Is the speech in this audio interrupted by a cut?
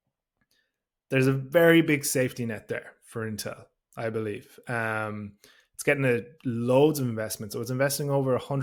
no; 0 cuts

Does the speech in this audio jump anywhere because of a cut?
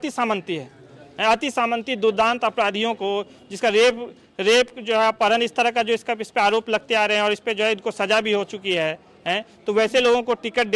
no; 0 cuts

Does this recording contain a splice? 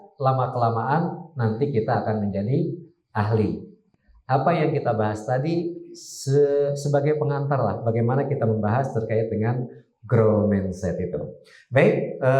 no; 0 cuts

